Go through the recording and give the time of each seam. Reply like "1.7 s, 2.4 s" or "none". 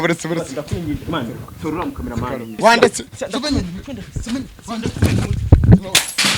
2.5 s